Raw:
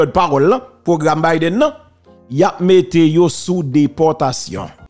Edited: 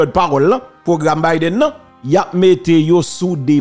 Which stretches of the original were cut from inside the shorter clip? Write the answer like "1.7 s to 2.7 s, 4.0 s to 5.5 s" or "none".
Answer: 1.9 s to 2.2 s